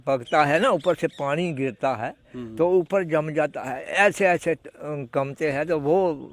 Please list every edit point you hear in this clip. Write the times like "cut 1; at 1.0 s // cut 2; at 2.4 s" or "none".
none